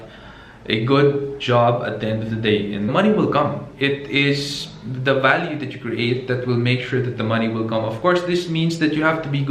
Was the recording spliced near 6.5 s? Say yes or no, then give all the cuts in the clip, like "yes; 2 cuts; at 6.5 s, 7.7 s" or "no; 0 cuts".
no; 1 cut; at 2.9 s